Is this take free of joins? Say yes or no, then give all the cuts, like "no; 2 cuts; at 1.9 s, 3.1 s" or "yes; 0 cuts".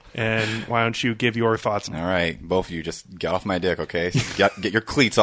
no; 1 cut; at 1.9 s